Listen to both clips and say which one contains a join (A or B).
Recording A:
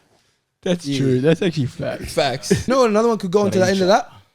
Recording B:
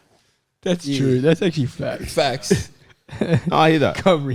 A